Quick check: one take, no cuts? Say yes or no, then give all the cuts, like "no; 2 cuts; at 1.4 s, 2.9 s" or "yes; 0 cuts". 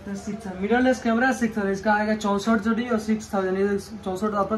yes; 0 cuts